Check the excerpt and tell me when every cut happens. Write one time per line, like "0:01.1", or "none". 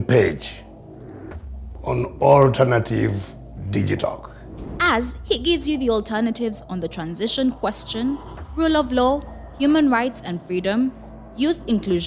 none